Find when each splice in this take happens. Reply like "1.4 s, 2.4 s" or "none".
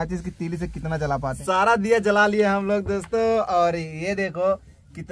1.4 s